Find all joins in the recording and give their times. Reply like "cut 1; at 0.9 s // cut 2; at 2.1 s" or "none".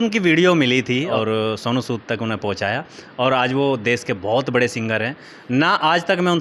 cut 1; at 1.1 s

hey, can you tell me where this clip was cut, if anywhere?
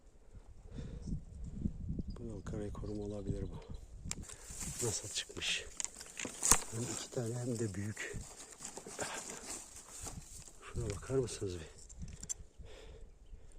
cut 1; at 4.1 s

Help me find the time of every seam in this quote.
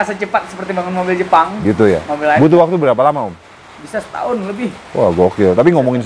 none

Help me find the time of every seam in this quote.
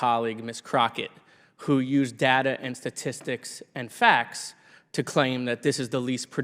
none

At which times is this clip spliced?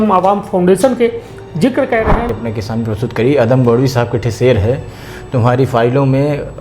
cut 1; at 2.3 s

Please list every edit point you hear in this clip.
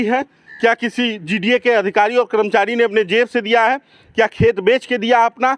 none

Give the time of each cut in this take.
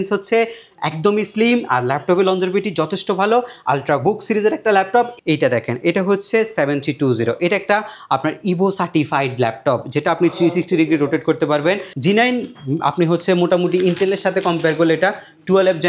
cut 1; at 5.1 s // cut 2; at 11.9 s

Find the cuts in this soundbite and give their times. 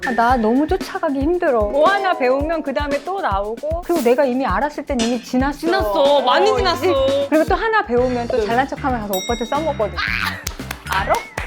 cut 1; at 1.7 s // cut 2; at 3.8 s // cut 3; at 7.2 s

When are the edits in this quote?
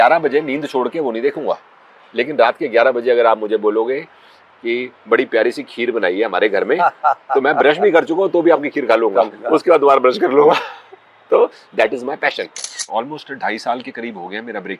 cut 1; at 12.7 s

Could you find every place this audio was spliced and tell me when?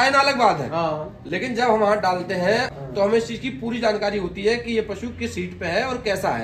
cut 1; at 2.7 s

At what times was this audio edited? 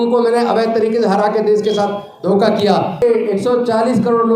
cut 1; at 3.0 s

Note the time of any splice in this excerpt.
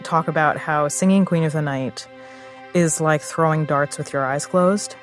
none

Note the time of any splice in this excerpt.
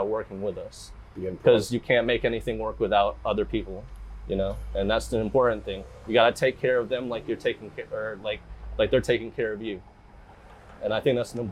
none

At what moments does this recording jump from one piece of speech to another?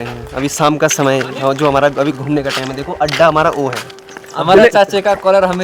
none

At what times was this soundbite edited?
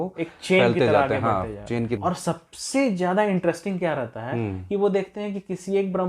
cut 1; at 2.0 s

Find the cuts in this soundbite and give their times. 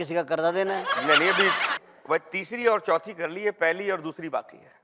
cut 1; at 1.7 s

